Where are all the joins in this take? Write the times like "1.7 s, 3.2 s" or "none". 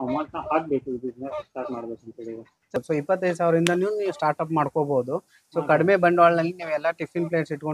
2.8 s